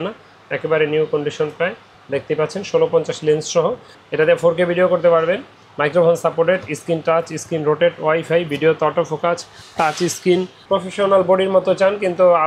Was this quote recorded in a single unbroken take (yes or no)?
no